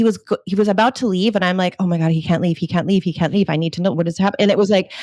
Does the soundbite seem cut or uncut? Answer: uncut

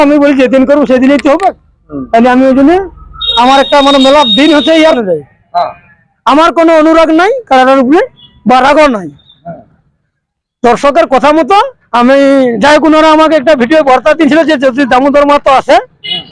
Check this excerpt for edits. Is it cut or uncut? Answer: cut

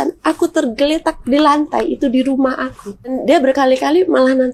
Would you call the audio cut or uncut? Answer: cut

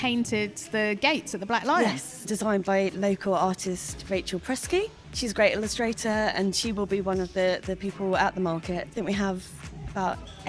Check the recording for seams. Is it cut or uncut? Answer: cut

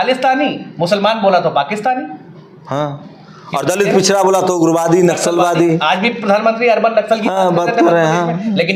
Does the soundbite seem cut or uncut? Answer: uncut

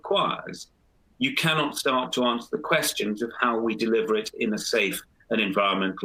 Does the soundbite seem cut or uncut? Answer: uncut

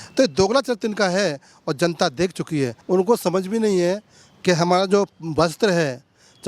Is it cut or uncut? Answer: cut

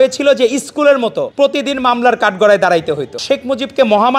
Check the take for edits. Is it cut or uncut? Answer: cut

